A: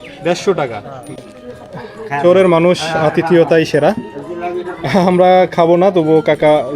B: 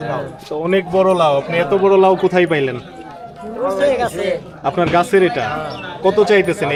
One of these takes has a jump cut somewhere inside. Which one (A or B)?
A